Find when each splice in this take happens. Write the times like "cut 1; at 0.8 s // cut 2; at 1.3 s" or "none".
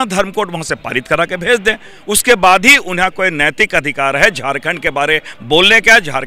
none